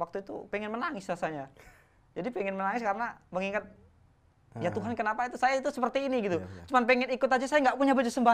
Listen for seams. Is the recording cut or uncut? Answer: uncut